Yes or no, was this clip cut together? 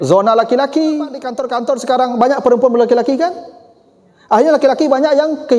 yes